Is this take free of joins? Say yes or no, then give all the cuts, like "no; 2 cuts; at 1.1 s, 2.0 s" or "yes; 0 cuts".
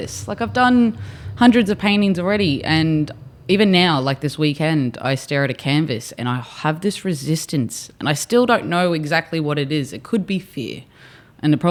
yes; 0 cuts